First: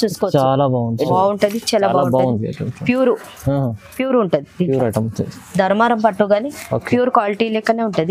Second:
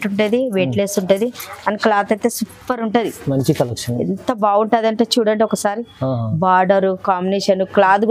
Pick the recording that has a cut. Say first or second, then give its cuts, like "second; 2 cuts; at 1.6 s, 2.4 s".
first; 1 cut; at 1.1 s